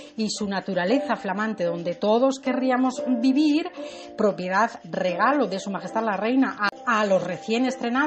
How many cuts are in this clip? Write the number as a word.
one